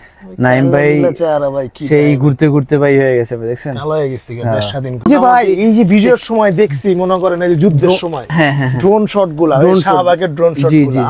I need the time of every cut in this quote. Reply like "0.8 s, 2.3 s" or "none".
5.0 s